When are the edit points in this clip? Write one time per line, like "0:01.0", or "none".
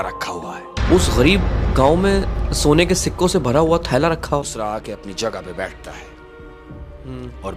0:04.5